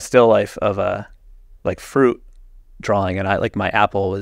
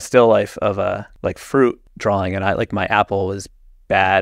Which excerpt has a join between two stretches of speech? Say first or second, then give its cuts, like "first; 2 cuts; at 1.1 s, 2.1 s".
second; 2 cuts; at 1.1 s, 1.9 s